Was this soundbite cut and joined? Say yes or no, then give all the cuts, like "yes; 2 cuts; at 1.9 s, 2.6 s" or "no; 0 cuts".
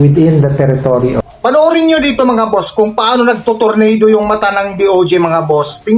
yes; 1 cut; at 1.3 s